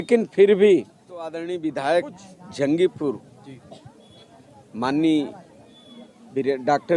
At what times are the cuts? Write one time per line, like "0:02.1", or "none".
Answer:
0:01.4